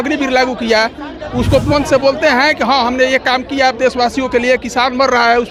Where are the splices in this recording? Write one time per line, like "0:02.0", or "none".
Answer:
none